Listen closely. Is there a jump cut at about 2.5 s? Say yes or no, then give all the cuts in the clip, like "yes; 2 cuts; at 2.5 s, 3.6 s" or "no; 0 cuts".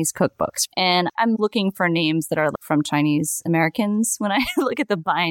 yes; 2 cuts; at 0.8 s, 2.5 s